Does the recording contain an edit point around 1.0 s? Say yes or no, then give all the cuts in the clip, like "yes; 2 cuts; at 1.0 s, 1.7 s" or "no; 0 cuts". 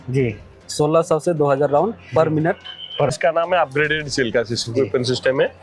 no; 1 cut; at 3.1 s